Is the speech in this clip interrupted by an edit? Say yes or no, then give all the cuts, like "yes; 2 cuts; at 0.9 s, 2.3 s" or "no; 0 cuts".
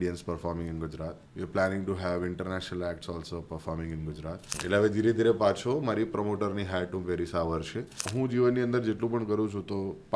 yes; 3 cuts; at 1.2 s, 4.5 s, 7.8 s